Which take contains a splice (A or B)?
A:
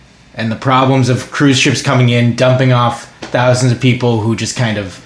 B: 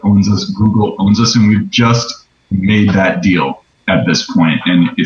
B